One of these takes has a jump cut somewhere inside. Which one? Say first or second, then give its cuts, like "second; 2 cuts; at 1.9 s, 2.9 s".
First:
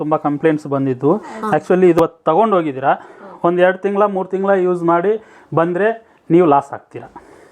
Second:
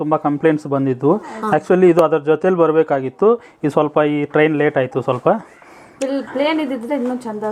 first; 1 cut; at 2.0 s